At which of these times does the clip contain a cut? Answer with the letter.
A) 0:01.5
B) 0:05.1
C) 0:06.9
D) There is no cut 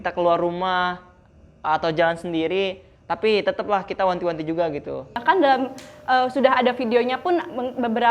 B